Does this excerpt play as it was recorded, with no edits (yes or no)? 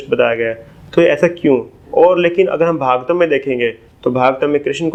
yes